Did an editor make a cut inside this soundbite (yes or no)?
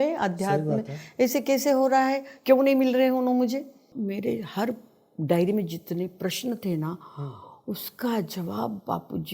yes